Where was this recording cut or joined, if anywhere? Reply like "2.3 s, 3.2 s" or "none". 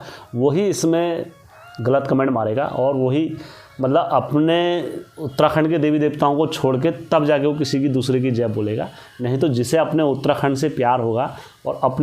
none